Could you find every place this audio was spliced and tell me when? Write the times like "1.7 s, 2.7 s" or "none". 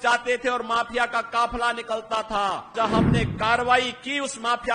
2.7 s